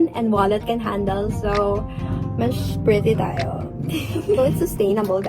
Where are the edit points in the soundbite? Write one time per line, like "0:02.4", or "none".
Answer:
0:04.4

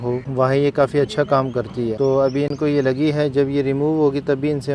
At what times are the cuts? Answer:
none

